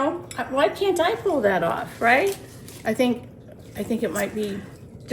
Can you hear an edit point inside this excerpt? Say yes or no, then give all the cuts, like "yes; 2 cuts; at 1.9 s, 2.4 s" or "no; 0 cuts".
no; 0 cuts